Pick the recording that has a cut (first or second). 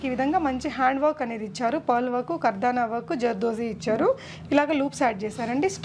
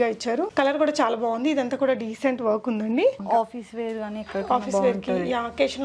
second